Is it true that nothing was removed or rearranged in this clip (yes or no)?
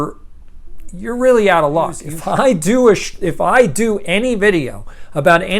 no